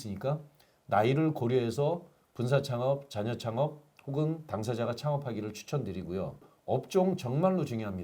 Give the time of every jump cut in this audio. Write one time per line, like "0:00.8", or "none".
0:06.5